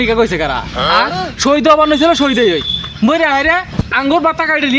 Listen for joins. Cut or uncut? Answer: uncut